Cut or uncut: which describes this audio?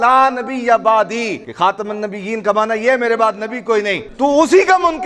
cut